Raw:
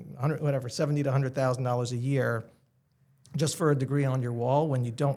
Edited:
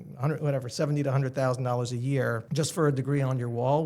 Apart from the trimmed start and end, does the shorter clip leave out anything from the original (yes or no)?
yes